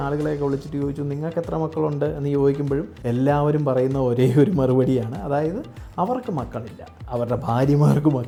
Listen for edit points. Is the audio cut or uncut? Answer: uncut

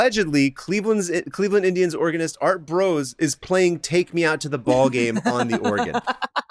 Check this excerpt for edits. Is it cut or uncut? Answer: uncut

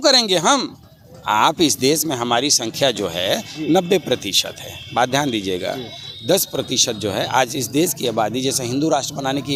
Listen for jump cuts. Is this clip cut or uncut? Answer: uncut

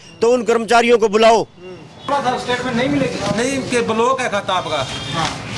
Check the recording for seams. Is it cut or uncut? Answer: cut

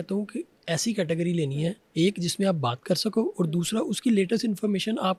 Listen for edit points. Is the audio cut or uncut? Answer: uncut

